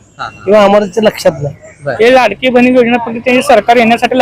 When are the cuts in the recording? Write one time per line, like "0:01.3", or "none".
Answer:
0:01.8